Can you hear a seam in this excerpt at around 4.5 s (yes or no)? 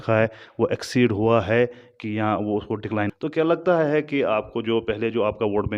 no